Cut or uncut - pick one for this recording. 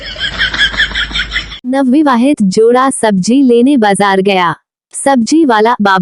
cut